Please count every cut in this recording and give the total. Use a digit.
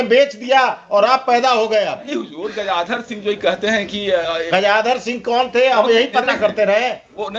0